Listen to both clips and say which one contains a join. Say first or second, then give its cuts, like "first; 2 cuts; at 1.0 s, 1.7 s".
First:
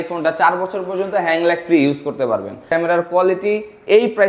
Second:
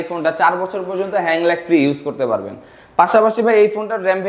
first; 1 cut; at 2.6 s